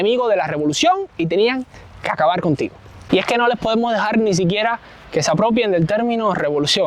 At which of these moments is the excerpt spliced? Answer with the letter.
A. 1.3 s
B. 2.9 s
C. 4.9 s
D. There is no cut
D